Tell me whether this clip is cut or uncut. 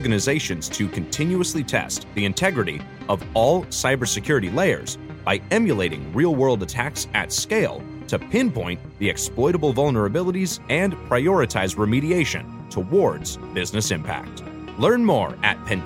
uncut